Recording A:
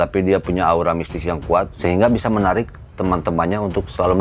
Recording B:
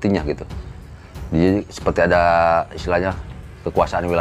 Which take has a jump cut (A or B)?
A